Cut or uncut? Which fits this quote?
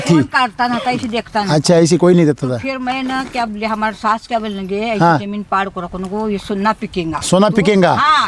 cut